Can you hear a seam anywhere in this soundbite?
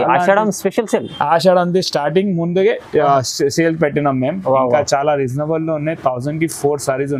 no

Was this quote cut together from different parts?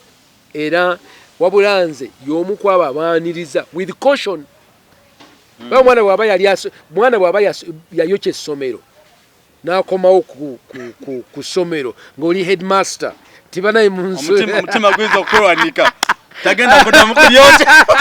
no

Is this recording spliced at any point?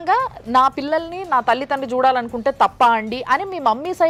no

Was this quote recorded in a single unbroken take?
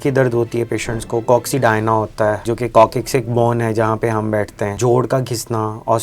no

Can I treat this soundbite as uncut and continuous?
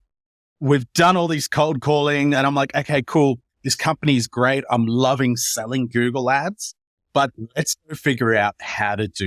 no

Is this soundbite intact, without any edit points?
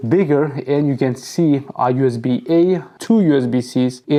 yes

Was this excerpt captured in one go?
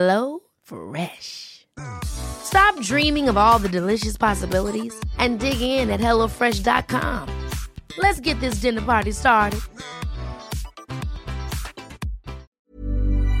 no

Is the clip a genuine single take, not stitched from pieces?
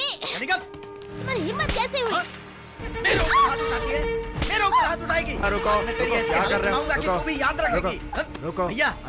no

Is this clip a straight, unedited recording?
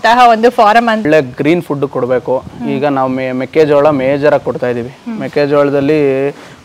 no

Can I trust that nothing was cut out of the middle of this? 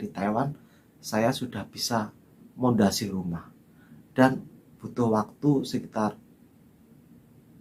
yes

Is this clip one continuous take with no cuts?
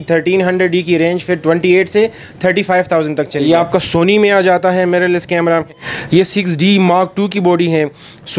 no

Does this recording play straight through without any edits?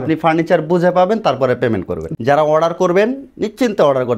no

